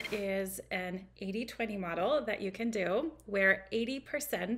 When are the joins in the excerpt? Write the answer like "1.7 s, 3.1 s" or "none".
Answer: none